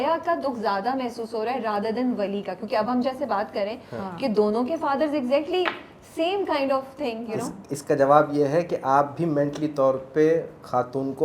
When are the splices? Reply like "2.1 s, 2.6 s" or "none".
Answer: none